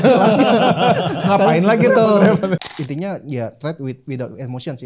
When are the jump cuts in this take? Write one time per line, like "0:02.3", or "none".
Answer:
0:02.6